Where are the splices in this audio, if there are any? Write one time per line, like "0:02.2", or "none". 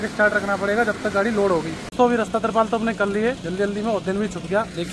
0:01.8